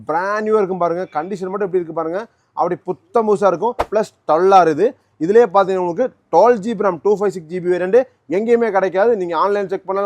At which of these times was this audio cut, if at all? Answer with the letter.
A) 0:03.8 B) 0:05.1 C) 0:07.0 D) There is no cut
A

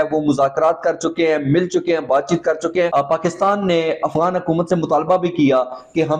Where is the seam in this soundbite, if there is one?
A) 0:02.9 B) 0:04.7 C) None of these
A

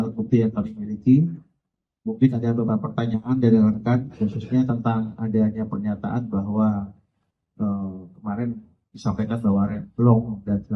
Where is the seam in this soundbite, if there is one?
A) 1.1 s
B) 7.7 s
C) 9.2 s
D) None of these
A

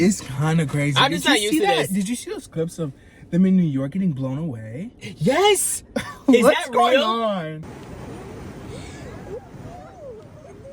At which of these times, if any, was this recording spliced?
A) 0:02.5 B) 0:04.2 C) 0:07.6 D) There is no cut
C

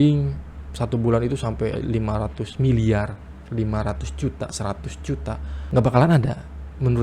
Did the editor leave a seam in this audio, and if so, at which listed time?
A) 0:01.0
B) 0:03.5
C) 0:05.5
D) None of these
C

